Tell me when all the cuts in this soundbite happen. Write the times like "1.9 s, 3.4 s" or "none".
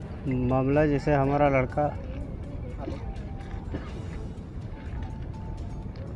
none

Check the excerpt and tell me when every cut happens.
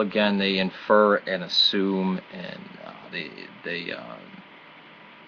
1.9 s

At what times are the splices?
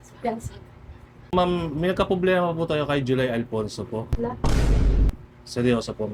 1.3 s, 4.4 s, 5.1 s

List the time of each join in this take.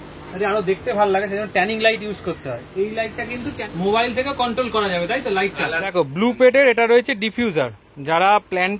3.6 s, 5.8 s

